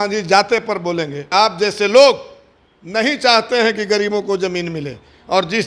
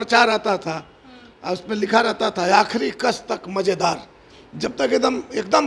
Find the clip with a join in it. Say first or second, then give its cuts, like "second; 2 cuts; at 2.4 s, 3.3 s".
first; 1 cut; at 1.3 s